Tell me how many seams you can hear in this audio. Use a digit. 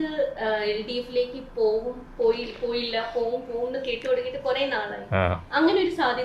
0